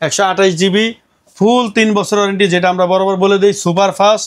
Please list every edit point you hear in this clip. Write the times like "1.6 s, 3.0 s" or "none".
none